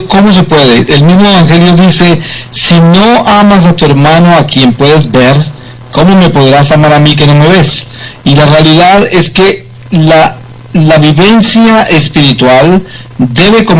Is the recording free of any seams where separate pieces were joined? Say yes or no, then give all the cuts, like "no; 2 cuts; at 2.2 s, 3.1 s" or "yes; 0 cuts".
yes; 0 cuts